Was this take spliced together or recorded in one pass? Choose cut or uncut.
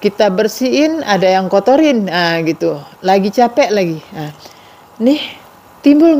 uncut